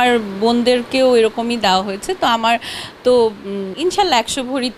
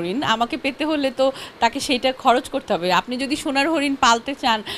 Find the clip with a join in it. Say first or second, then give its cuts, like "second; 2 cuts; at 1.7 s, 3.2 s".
first; 1 cut; at 3.7 s